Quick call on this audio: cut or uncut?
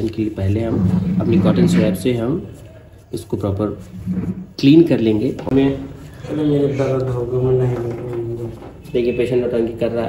cut